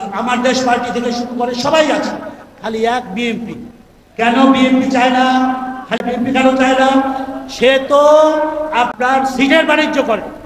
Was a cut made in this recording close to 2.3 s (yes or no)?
no